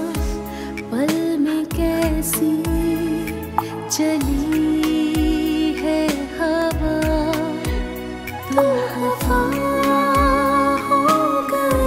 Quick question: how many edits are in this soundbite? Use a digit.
0